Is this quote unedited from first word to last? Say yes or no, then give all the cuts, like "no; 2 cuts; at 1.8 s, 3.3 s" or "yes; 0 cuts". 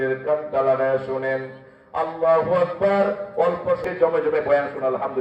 no; 1 cut; at 3.8 s